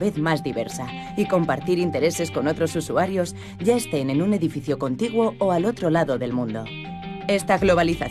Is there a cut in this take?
yes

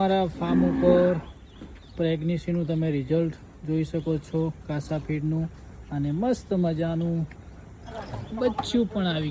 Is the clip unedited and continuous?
yes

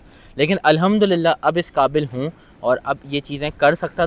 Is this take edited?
no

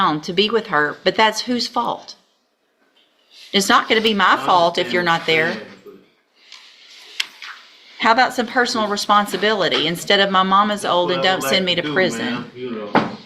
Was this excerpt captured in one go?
yes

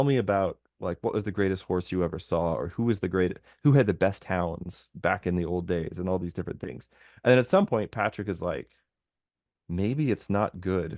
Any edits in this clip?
no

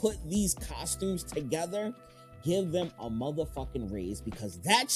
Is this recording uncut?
yes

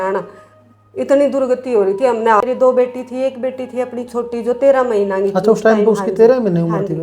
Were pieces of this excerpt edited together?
yes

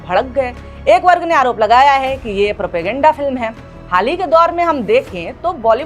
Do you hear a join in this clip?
no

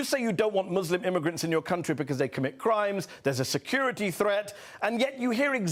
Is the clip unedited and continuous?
yes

